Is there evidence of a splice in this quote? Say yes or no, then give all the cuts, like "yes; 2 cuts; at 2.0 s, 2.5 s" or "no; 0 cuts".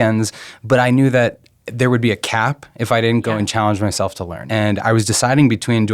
yes; 1 cut; at 4.4 s